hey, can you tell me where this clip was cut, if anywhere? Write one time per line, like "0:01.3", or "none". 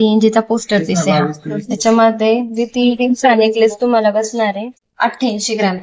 0:04.8